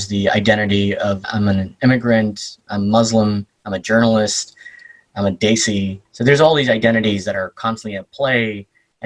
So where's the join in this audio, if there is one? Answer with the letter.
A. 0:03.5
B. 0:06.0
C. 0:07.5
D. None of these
B